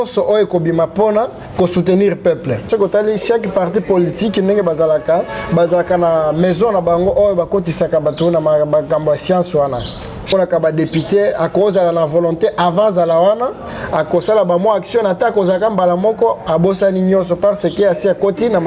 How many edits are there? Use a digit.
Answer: 2